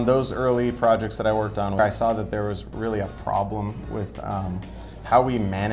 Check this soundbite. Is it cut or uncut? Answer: cut